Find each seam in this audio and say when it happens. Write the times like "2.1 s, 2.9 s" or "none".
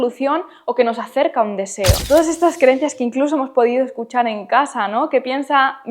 2.0 s